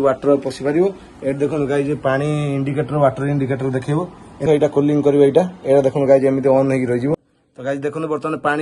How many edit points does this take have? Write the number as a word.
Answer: two